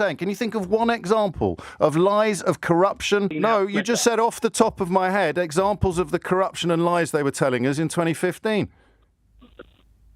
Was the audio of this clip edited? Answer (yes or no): yes